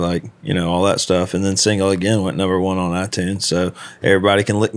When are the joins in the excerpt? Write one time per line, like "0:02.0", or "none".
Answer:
none